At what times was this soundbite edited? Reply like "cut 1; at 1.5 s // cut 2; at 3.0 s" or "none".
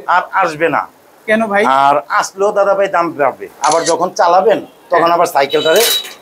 cut 1; at 3.5 s

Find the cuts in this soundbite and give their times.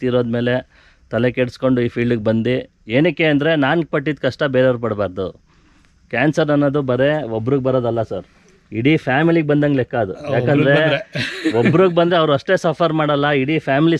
none

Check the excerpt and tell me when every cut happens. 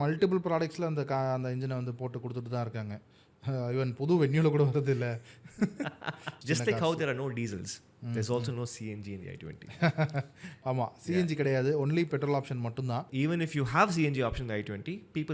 cut 1; at 6.4 s // cut 2; at 13.1 s

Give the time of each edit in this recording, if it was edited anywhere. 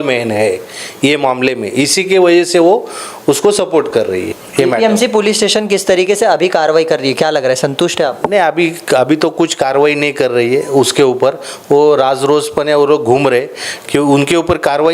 cut 1; at 4.4 s

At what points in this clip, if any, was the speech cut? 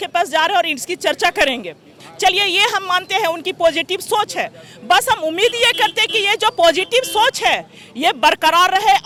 none

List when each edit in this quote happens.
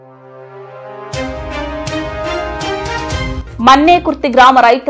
cut 1; at 3.4 s

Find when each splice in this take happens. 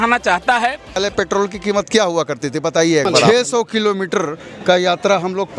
cut 1; at 1.0 s // cut 2; at 3.2 s

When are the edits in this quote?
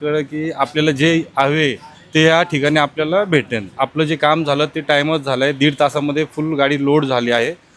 cut 1; at 3.7 s

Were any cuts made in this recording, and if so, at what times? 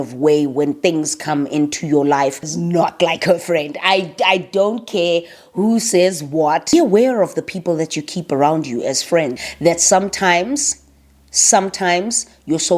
cut 1; at 2.5 s // cut 2; at 6.7 s // cut 3; at 9.4 s

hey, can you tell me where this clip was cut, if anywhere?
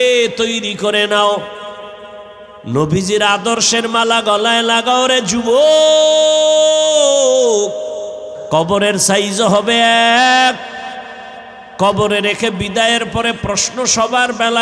cut 1; at 8.3 s

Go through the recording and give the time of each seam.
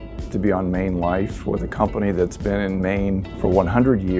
cut 1; at 3.3 s

